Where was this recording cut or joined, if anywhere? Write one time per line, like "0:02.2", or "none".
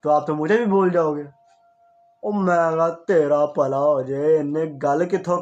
none